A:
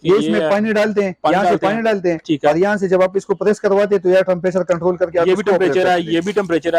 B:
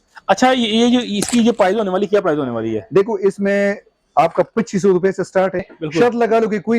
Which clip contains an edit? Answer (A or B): B